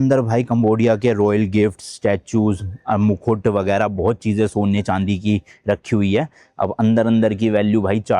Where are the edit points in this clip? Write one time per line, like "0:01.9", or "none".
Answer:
none